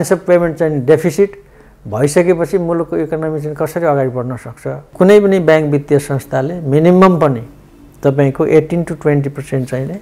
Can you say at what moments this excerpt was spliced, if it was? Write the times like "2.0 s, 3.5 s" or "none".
4.8 s